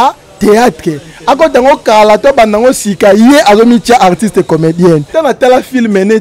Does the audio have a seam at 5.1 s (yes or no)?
yes